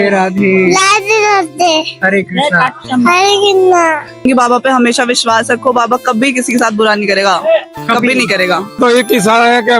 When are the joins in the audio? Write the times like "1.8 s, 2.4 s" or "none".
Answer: 4.2 s, 8.8 s